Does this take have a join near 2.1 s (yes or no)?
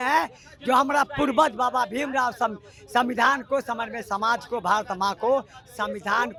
no